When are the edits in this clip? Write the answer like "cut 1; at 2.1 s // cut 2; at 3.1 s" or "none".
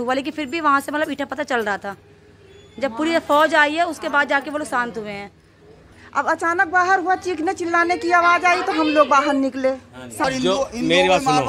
cut 1; at 10.2 s